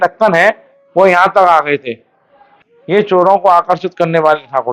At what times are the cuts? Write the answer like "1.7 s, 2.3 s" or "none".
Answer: 2.5 s

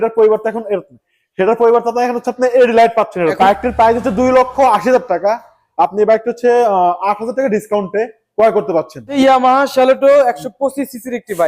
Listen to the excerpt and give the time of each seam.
3.4 s, 9.2 s

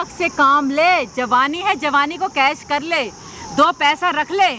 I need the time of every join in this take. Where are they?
none

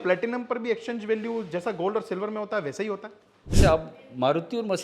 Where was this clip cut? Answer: 3.6 s

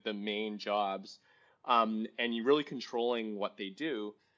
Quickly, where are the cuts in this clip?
none

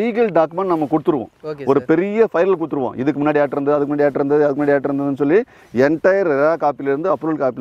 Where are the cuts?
none

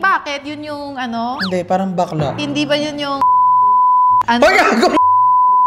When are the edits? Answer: none

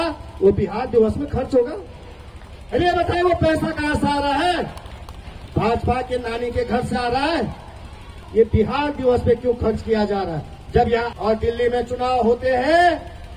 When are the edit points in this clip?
8.1 s, 11.1 s

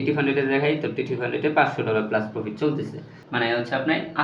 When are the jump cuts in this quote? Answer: 3.1 s

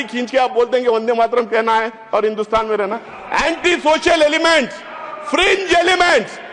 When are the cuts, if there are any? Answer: none

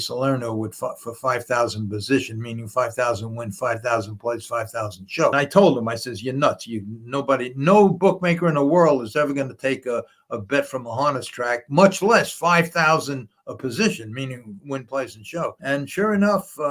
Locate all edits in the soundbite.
5.3 s, 15.6 s

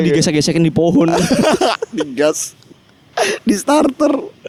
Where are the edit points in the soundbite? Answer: none

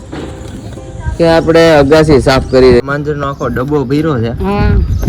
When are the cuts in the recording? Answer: 2.8 s

